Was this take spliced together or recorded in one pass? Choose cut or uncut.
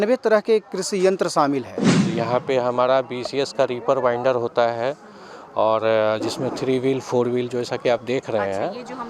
cut